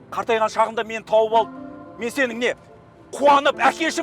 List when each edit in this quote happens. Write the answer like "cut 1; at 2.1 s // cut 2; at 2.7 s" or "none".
none

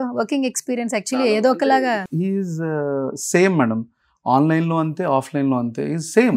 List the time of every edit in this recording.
cut 1; at 2.0 s

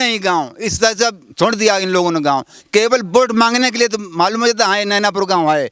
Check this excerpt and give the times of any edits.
none

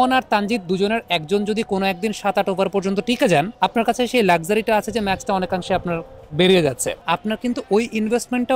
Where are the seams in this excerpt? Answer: cut 1; at 3.5 s // cut 2; at 6.9 s

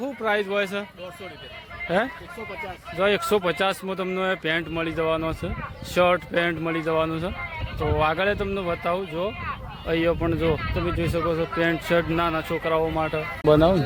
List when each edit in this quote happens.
none

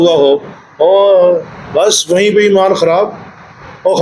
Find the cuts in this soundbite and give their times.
none

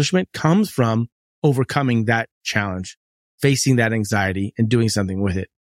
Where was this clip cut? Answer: none

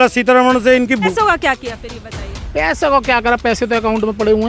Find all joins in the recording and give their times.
cut 1; at 1.1 s

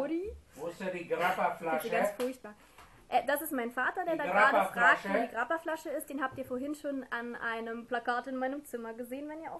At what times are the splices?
cut 1; at 4.3 s

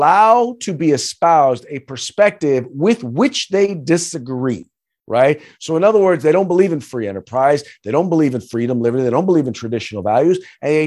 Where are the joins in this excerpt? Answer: none

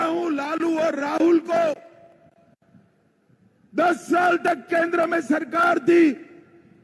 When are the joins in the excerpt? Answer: none

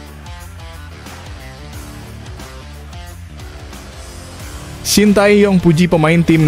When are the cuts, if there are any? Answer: none

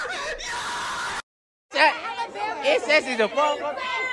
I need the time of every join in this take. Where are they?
none

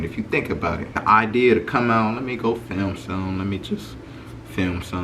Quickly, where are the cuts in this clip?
cut 1; at 0.9 s

